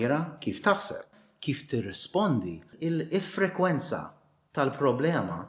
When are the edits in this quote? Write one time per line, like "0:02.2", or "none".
0:01.2
0:02.7